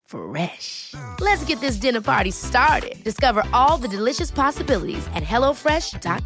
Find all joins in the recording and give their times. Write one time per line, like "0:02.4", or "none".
none